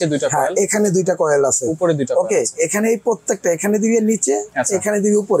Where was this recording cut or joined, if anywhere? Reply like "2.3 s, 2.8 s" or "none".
none